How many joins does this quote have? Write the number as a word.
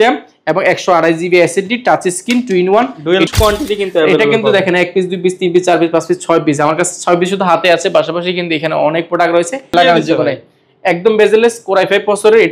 two